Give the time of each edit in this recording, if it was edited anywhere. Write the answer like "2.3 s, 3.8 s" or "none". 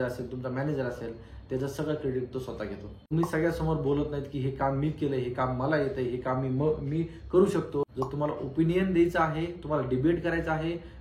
2.9 s, 7.9 s